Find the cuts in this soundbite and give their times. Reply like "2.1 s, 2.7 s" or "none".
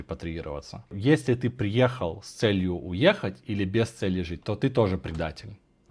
0.9 s